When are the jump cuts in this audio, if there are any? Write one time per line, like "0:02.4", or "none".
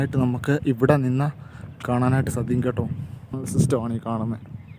0:03.4